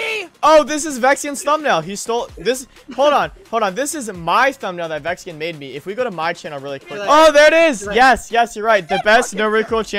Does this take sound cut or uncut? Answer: cut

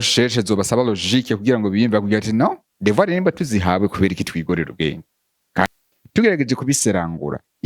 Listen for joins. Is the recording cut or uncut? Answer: cut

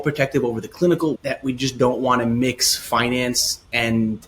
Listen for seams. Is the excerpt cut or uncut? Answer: cut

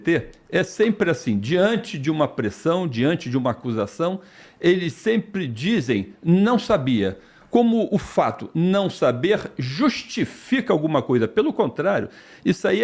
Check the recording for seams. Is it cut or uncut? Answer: uncut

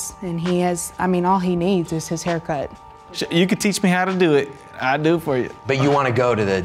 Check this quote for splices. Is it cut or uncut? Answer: cut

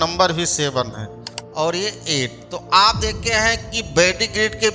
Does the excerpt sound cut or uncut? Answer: cut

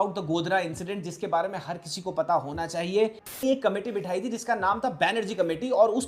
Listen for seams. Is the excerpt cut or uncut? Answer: cut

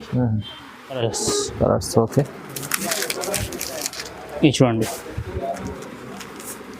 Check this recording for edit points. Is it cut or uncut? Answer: cut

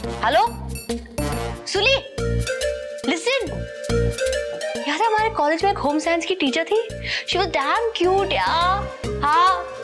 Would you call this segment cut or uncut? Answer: uncut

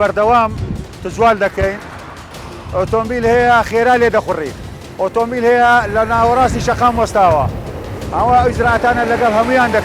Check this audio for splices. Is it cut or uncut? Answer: cut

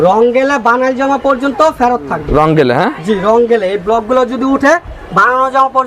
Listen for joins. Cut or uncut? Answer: uncut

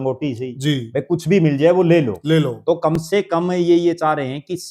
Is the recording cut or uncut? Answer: uncut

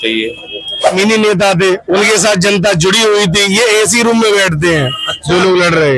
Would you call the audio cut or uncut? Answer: cut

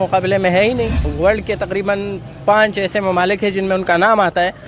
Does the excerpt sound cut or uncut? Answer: cut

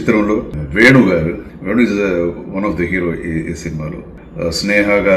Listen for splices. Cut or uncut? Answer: uncut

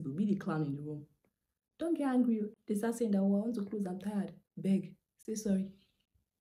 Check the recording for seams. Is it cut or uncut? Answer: uncut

